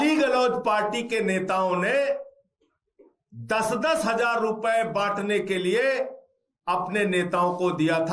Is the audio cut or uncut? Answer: uncut